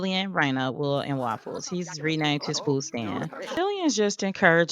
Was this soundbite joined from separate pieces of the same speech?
yes; 1 cut; at 3.4 s

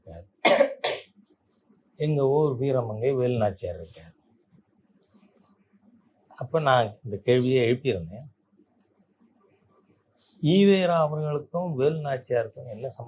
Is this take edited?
no; 0 cuts

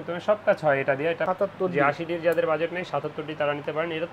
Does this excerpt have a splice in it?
yes; 1 cut; at 1.3 s

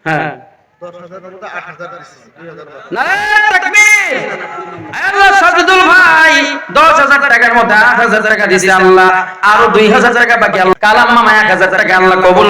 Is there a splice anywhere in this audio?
yes; 1 cut; at 10.7 s

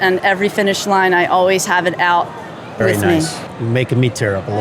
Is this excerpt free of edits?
no; 1 cut; at 3.4 s

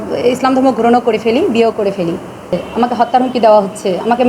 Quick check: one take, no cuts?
no; 1 cut; at 2.4 s

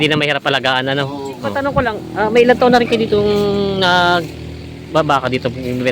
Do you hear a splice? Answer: yes; 1 cut; at 1.7 s

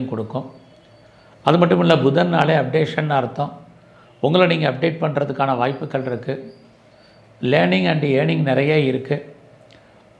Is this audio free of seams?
yes; 0 cuts

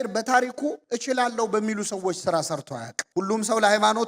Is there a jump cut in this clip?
yes; 1 cut; at 3.0 s

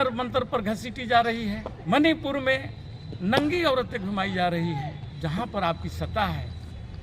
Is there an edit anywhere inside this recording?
yes; 2 cuts; at 1.7 s, 5.0 s

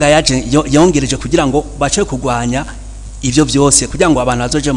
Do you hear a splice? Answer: no; 0 cuts

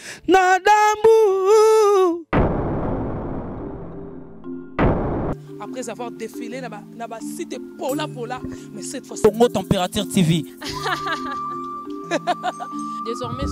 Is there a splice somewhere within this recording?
no; 0 cuts

